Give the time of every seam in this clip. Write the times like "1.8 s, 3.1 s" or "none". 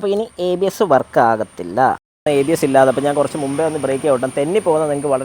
2.2 s